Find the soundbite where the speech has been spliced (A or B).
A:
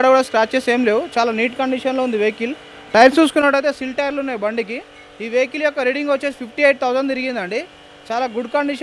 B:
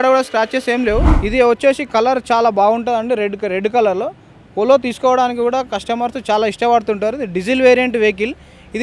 B